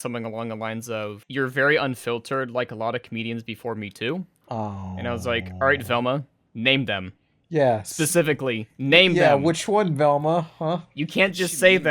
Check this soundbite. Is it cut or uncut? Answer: cut